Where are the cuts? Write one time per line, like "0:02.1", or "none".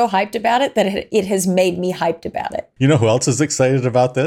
0:02.7